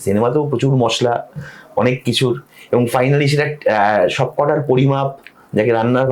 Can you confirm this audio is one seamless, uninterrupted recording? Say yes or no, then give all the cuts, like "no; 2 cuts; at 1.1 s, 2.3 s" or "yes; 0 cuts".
yes; 0 cuts